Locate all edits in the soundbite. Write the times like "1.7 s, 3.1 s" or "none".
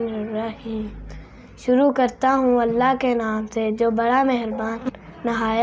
none